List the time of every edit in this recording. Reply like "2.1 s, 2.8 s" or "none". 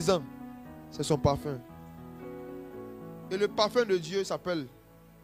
none